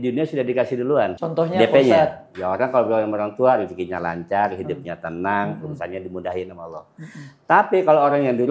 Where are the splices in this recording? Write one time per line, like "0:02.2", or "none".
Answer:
0:01.2